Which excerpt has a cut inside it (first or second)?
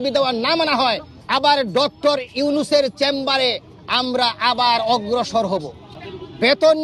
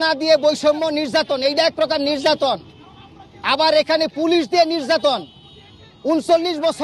first